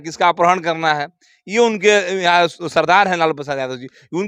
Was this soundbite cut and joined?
no; 0 cuts

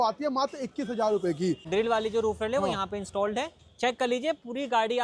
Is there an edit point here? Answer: yes; 1 cut; at 1.6 s

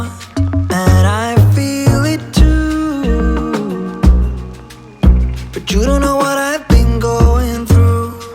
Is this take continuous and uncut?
no; 1 cut; at 6.6 s

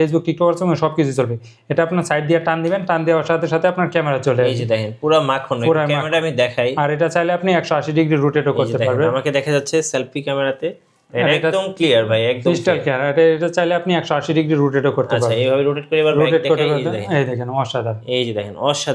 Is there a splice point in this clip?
no; 0 cuts

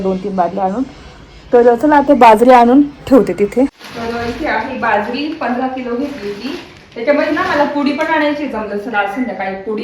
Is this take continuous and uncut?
no; 1 cut; at 4.4 s

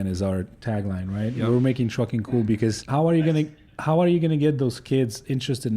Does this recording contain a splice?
yes; 1 cut; at 2.8 s

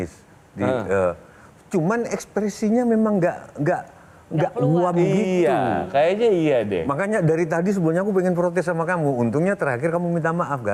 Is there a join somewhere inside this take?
no; 0 cuts

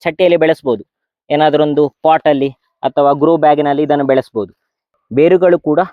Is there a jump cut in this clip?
yes; 1 cut; at 5.0 s

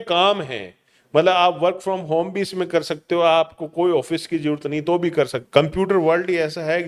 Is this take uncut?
no; 1 cut; at 5.4 s

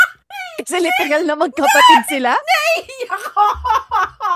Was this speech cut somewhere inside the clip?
no; 0 cuts

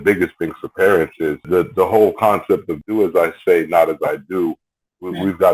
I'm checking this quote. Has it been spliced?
yes; 2 cuts; at 1.4 s, 2.7 s

